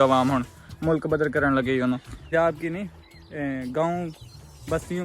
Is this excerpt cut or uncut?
cut